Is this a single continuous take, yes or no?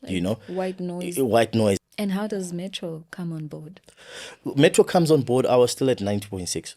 no